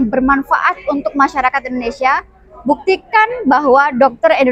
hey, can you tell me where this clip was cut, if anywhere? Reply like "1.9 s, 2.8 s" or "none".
none